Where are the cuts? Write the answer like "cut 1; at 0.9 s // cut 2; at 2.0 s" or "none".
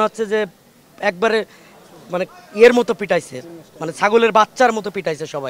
none